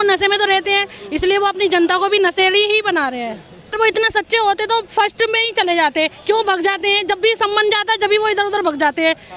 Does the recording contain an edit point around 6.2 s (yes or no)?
no